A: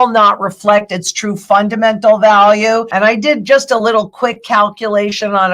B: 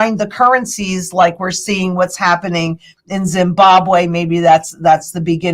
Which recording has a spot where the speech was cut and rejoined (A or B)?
A